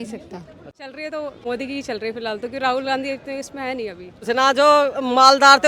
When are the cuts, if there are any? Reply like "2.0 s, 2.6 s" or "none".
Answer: 1.1 s, 4.2 s

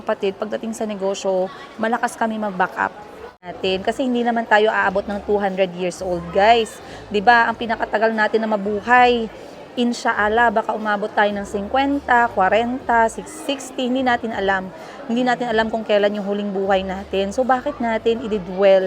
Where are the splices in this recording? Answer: 3.3 s

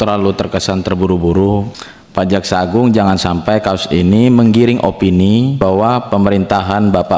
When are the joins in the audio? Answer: 1.7 s, 5.6 s

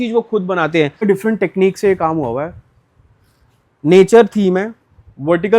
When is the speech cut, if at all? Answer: 1.0 s

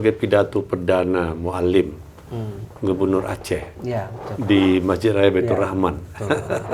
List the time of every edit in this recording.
none

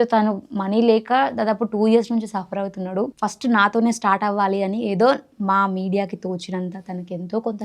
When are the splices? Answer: 3.1 s

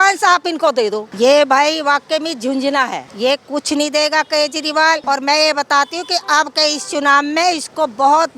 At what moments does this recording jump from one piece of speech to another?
1.1 s, 3.0 s, 5.0 s

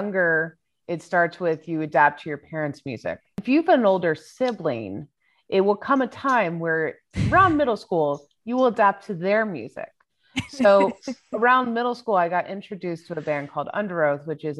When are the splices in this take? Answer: 3.4 s

